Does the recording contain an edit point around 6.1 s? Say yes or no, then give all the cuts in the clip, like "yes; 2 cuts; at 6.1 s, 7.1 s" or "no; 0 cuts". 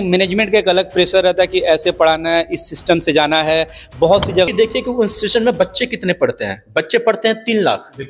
no; 1 cut; at 4.5 s